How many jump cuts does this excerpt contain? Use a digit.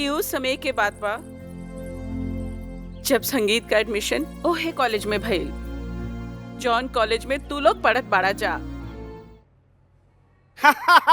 1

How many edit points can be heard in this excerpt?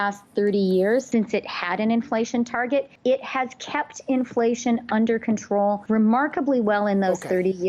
0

